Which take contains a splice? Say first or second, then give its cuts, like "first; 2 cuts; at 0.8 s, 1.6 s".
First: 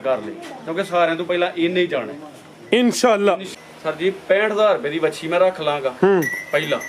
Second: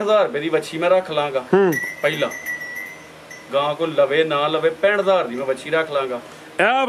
first; 1 cut; at 3.5 s